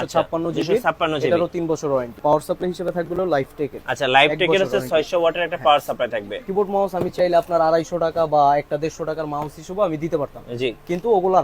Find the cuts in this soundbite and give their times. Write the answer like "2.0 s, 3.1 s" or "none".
2.2 s, 6.4 s